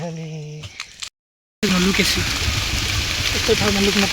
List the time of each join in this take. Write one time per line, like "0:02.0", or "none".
0:01.4